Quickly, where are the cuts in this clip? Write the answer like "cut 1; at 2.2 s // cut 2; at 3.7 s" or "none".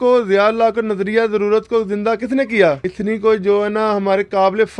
cut 1; at 2.9 s